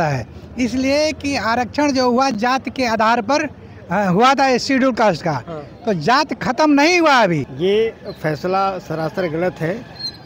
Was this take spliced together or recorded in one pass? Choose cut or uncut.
cut